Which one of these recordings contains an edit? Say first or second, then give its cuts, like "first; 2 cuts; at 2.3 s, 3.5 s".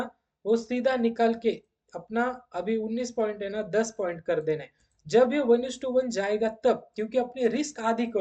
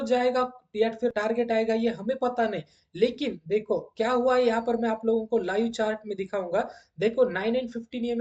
second; 1 cut; at 1.1 s